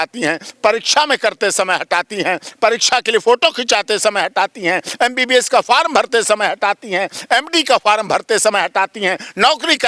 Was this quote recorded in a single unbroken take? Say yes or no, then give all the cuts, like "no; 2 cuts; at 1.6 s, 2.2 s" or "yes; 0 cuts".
yes; 0 cuts